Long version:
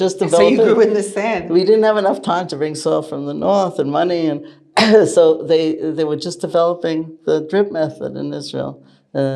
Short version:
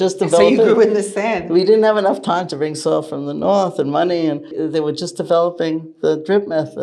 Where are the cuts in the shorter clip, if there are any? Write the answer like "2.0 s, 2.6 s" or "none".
4.6 s